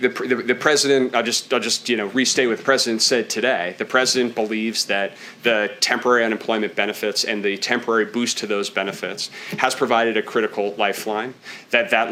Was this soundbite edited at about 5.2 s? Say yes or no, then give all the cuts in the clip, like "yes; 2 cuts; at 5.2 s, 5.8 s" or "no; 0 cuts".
no; 0 cuts